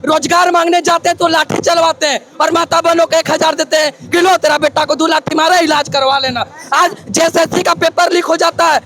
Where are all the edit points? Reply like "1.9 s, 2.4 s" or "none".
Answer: none